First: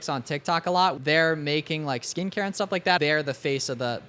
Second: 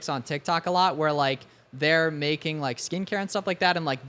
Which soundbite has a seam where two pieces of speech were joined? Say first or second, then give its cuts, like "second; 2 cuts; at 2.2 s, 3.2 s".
first; 2 cuts; at 1.0 s, 3.0 s